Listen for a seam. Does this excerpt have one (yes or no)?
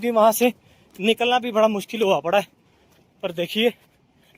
no